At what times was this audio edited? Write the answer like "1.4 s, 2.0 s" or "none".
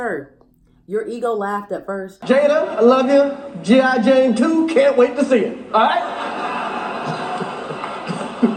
none